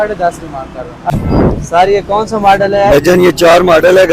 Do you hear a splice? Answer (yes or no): yes